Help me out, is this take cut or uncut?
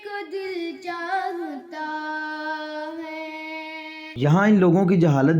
cut